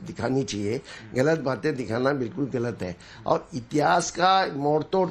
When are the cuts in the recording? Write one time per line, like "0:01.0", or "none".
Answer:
0:01.4